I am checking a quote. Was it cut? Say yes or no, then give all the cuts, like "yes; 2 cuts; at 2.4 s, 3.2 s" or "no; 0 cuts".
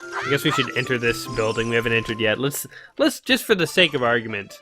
no; 0 cuts